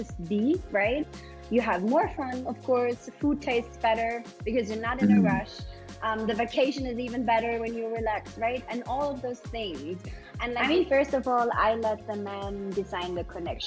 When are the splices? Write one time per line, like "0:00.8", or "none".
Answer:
0:10.6

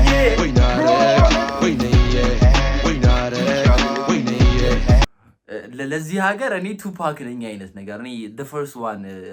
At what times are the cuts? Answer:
0:05.0

